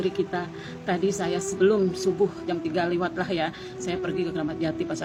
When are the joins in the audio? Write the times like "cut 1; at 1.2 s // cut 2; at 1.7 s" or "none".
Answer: none